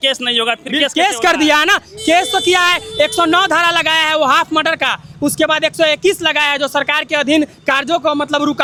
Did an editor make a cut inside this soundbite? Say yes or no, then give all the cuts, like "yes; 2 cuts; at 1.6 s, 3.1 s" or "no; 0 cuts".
no; 0 cuts